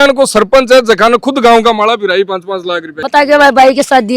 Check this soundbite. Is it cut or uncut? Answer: cut